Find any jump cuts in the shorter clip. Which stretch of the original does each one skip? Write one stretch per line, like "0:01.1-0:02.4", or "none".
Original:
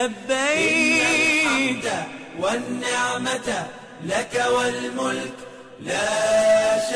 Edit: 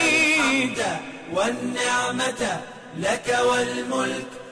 none